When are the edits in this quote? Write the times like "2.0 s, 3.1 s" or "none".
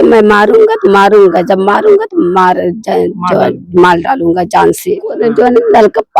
5.2 s